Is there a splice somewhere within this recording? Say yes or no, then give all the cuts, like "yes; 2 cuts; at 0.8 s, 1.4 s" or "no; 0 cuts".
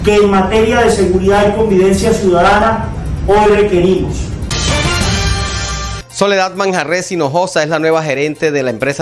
yes; 2 cuts; at 4.5 s, 6.0 s